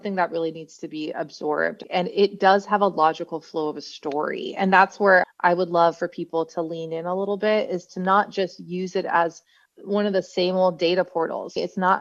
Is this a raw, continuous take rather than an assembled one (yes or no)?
no